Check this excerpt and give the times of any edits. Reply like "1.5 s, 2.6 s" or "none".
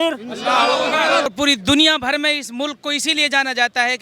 1.3 s